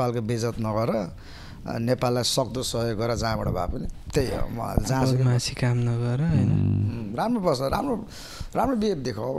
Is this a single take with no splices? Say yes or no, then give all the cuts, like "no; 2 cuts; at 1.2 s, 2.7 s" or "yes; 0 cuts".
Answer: yes; 0 cuts